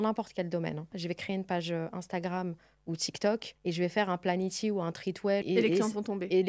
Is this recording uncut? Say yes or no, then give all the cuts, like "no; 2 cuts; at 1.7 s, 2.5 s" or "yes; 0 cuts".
no; 3 cuts; at 1.0 s, 3.5 s, 5.4 s